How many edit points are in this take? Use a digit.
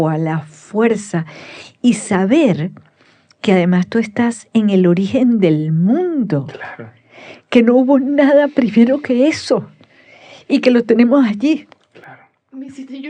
0